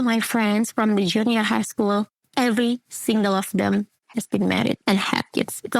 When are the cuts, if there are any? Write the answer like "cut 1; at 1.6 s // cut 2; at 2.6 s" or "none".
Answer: none